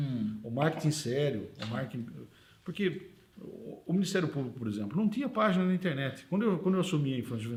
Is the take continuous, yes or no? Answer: yes